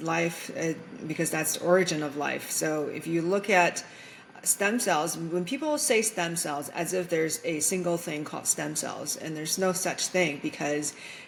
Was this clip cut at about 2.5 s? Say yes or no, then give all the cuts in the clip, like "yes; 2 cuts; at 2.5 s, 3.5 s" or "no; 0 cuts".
no; 0 cuts